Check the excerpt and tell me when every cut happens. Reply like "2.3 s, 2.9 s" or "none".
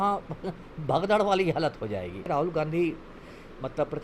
2.3 s